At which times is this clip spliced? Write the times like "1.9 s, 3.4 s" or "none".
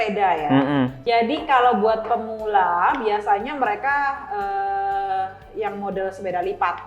0.9 s

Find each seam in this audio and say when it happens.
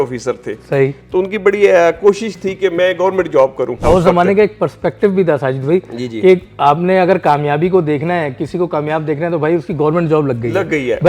3.8 s

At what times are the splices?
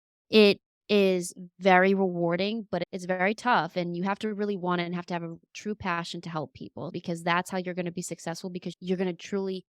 6.9 s, 8.7 s

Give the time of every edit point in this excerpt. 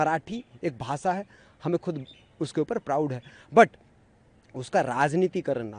none

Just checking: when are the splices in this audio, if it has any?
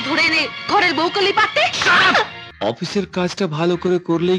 2.4 s

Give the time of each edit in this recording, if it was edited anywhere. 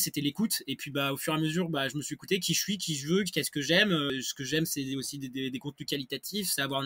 4.1 s

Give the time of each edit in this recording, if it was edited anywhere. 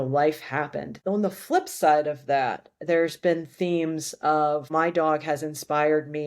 0.9 s, 4.7 s

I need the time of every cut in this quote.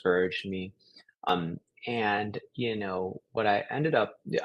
1.3 s

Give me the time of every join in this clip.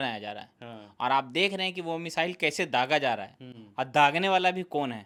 none

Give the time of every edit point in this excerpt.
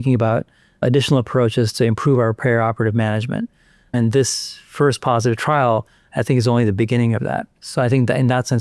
none

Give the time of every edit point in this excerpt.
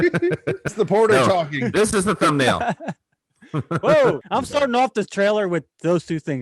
0.7 s, 4.2 s

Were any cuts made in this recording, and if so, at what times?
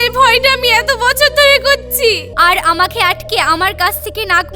2.3 s

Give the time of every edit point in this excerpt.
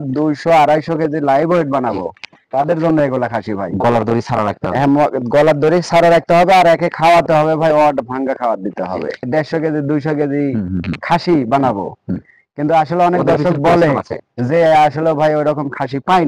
none

